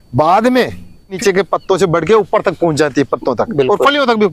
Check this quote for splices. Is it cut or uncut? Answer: cut